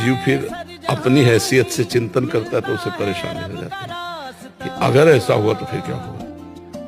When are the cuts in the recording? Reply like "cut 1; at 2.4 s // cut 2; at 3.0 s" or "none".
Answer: none